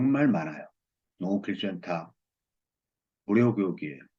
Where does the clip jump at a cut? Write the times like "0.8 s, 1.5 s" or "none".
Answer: none